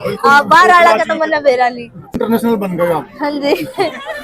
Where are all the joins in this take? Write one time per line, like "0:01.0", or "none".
0:02.2